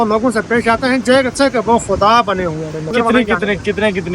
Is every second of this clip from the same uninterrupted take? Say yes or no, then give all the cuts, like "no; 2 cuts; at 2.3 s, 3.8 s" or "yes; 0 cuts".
no; 1 cut; at 2.9 s